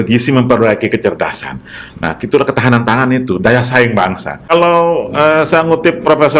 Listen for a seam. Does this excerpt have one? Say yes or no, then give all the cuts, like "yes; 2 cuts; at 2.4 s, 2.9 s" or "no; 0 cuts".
yes; 1 cut; at 4.5 s